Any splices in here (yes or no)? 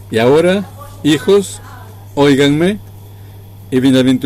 no